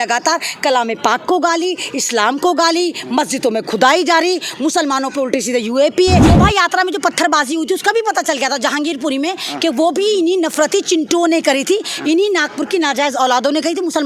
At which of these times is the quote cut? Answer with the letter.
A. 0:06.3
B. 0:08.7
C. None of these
A